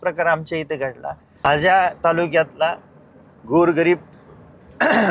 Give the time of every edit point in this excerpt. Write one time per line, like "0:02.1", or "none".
0:01.4